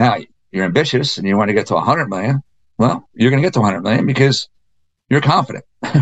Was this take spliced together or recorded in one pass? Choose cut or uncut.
uncut